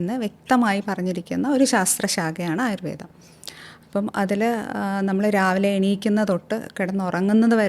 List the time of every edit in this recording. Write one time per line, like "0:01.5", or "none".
none